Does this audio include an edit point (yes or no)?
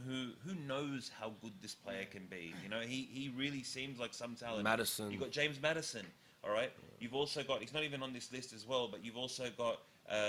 no